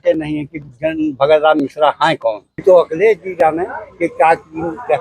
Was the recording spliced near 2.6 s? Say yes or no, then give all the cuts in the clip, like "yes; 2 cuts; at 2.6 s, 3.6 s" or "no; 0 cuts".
yes; 1 cut; at 2.6 s